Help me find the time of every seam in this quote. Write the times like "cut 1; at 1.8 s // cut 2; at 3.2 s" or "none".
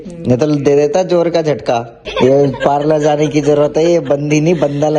cut 1; at 2.0 s